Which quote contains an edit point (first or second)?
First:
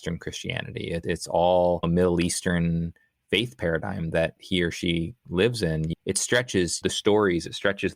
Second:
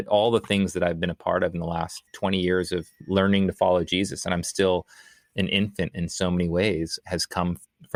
first